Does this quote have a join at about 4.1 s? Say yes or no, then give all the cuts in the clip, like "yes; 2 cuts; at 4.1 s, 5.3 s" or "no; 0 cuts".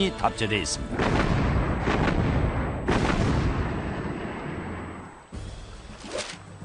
yes; 1 cut; at 4.1 s